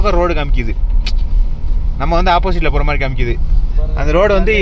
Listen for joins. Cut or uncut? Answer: uncut